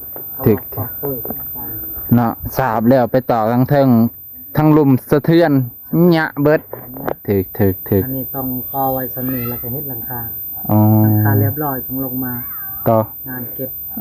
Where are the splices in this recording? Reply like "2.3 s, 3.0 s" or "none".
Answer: none